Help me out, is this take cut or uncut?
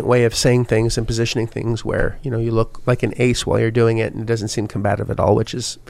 uncut